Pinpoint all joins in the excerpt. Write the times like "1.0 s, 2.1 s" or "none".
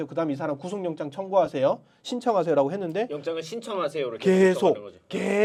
none